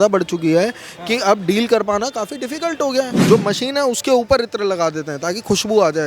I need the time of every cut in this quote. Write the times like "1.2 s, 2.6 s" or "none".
3.2 s